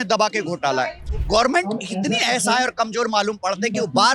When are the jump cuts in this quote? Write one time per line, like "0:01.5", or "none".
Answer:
0:01.1